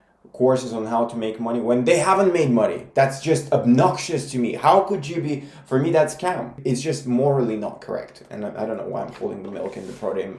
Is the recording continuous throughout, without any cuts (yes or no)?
no